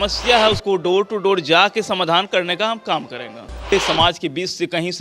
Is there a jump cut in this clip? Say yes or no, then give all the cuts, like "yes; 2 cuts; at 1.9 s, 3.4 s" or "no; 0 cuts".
yes; 1 cut; at 3.7 s